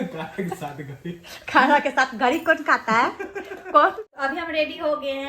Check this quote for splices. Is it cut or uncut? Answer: cut